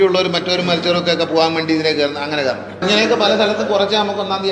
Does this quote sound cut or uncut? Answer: cut